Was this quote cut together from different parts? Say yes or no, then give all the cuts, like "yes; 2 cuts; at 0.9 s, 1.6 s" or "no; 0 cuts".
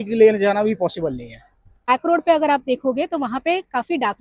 yes; 1 cut; at 1.9 s